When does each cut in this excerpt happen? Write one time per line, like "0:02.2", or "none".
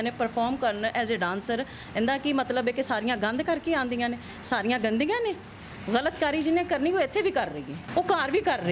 0:05.6
0:07.7

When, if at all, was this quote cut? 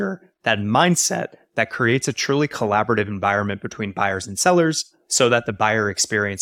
none

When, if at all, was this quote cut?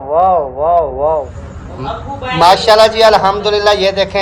0:02.0

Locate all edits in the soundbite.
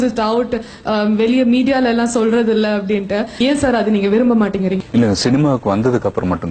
0:03.4
0:04.8

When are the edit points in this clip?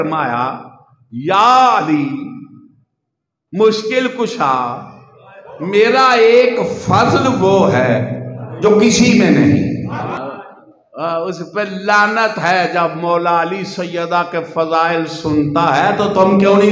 0:10.2

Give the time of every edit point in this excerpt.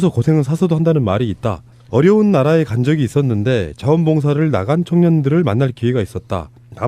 0:03.4

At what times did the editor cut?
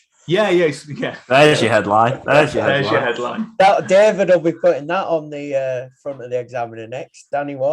none

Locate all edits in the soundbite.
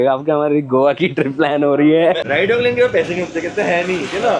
0:02.2

